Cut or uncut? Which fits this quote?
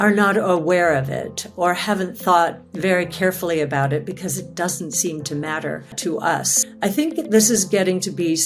cut